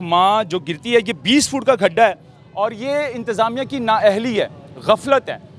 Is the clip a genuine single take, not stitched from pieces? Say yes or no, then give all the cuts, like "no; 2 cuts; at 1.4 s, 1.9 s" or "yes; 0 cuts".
yes; 0 cuts